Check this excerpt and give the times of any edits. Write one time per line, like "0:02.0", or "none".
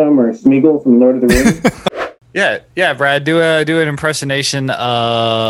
0:01.8